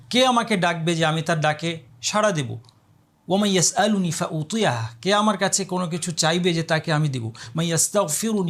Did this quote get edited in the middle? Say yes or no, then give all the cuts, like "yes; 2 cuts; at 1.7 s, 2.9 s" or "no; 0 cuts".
no; 0 cuts